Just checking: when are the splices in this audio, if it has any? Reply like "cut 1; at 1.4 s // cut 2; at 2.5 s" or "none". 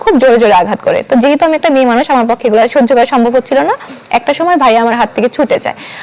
none